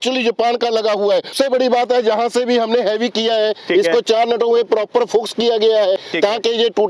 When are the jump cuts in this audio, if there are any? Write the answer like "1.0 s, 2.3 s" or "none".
1.3 s, 6.1 s

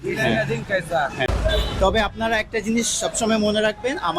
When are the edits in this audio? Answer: 1.3 s

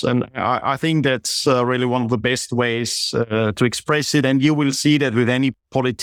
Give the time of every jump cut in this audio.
none

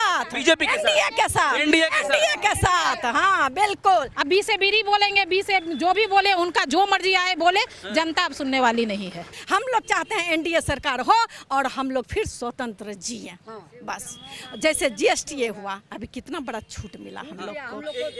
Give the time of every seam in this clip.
4.2 s, 9.3 s

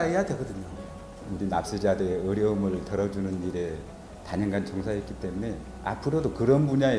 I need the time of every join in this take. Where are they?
1.1 s

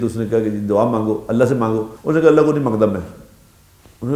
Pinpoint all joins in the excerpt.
1.9 s

